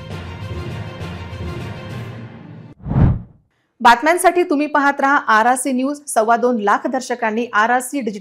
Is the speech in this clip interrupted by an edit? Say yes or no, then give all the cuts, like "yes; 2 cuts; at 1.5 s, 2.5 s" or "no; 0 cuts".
no; 0 cuts